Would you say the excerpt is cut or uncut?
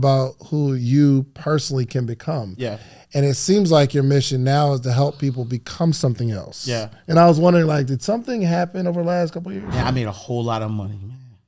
uncut